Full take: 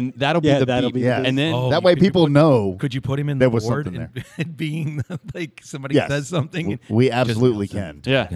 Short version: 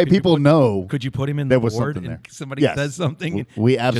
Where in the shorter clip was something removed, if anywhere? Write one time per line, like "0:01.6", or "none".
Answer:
0:02.3